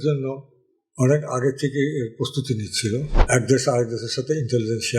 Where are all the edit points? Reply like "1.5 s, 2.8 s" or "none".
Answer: 3.1 s